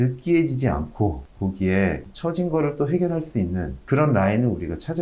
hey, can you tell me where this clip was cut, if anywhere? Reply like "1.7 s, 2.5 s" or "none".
none